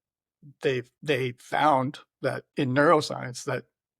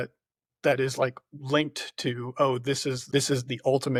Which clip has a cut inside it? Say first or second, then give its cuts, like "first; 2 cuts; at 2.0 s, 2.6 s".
first; 2 cuts; at 0.9 s, 2.4 s